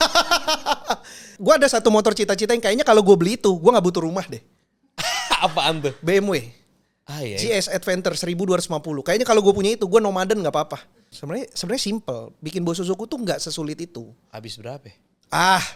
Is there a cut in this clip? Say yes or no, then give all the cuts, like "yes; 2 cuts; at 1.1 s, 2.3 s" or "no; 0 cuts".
yes; 2 cuts; at 1.3 s, 11.1 s